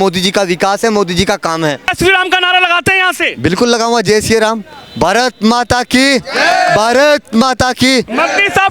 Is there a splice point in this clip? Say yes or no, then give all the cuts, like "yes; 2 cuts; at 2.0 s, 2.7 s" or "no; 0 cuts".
yes; 1 cut; at 1.9 s